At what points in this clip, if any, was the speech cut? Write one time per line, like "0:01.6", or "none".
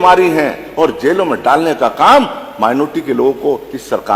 none